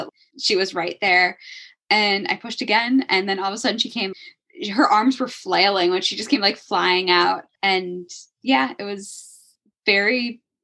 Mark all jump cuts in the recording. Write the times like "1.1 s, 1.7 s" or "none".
4.1 s